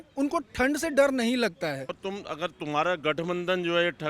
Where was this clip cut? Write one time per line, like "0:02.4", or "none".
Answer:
0:01.9